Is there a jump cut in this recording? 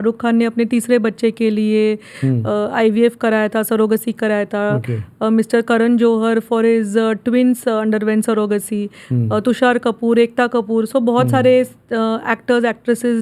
no; 0 cuts

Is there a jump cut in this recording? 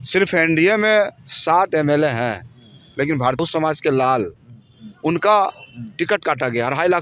yes; 1 cut; at 3.4 s

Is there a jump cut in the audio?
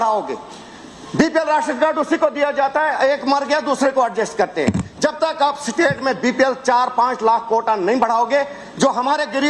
no; 0 cuts

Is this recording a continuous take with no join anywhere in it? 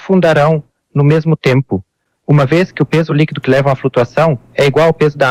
yes; 0 cuts

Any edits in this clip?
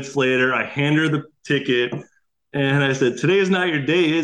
no; 0 cuts

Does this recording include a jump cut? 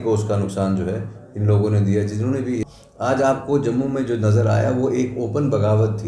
yes; 1 cut; at 2.6 s

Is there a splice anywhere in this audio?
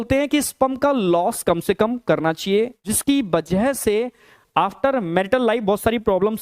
yes; 1 cut; at 2.8 s

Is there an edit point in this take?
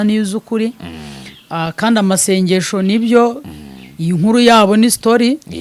no; 0 cuts

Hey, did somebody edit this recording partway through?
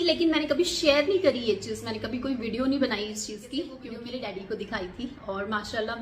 yes; 1 cut; at 3.9 s

